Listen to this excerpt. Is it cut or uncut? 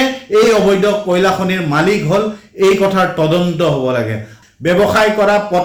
cut